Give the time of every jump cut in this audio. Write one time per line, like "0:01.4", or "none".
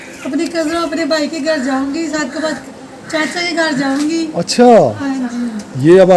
none